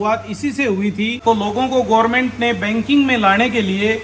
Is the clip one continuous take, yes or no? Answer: no